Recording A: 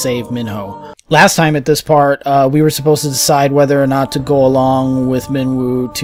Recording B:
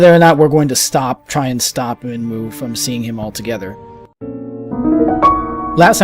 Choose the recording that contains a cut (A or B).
B